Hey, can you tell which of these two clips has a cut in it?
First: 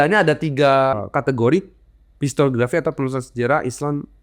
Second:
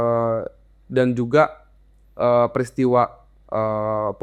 first; 1 cut; at 1.0 s

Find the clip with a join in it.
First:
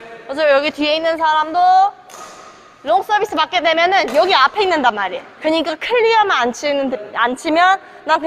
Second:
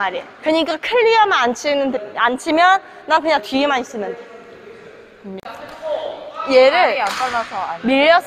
second; 1 cut; at 5.4 s

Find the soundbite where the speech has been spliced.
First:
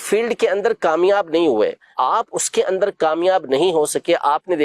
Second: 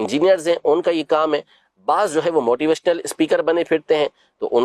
first; 1 cut; at 1.8 s

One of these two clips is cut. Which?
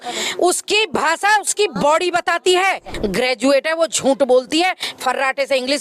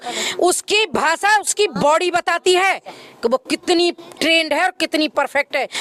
first; 1 cut; at 2.9 s

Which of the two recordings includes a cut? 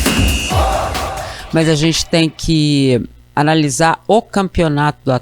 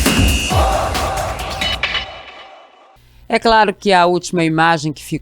first; 1 cut; at 1.3 s

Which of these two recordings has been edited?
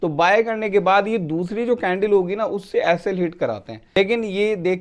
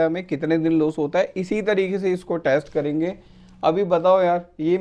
first; 1 cut; at 3.8 s

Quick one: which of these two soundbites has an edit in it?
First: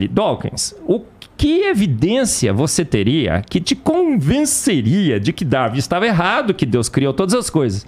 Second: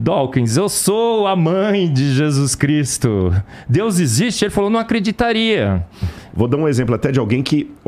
second; 1 cut; at 6.2 s

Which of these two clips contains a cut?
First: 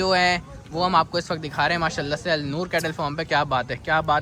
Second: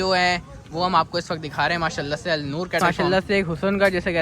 second; 1 cut; at 2.8 s

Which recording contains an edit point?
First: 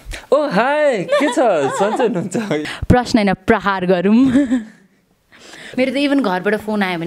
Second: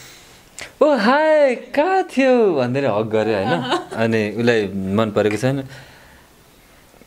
first; 2 cuts; at 2.7 s, 5.7 s

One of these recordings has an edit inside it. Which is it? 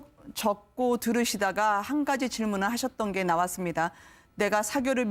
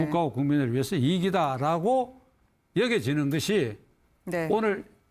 second; 1 cut; at 1.3 s

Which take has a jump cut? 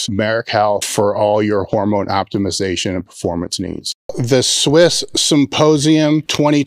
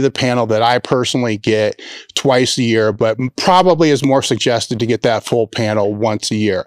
first; 1 cut; at 3.9 s

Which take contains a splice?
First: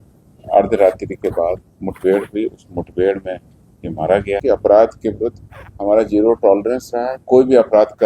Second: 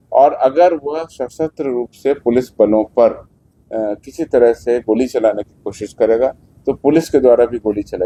first; 1 cut; at 4.4 s

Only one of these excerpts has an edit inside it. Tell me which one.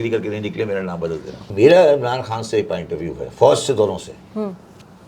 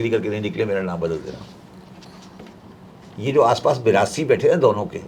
first; 1 cut; at 1.5 s

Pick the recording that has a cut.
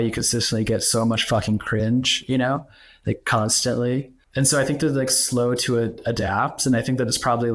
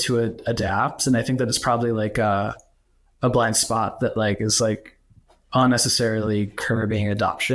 first; 1 cut; at 4.2 s

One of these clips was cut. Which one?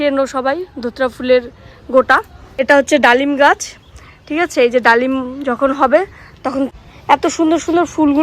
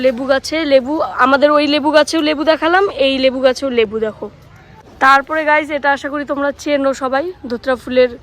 first; 2 cuts; at 2.5 s, 6.7 s

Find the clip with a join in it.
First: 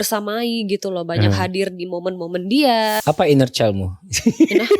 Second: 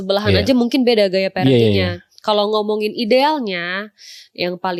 first; 1 cut; at 3.0 s

